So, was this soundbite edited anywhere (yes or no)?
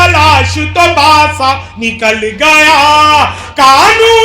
no